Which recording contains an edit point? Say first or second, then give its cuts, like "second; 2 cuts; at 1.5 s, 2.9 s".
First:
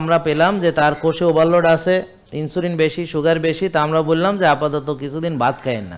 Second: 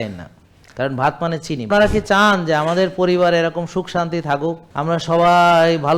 second; 2 cuts; at 1.7 s, 4.6 s